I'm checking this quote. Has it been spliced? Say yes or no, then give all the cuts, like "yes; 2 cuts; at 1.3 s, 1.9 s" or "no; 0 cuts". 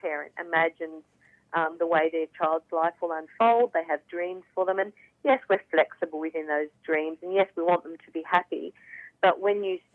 no; 0 cuts